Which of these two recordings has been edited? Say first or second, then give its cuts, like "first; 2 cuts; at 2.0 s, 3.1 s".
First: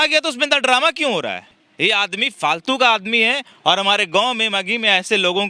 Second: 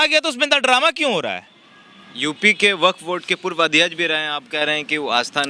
first; 1 cut; at 1.6 s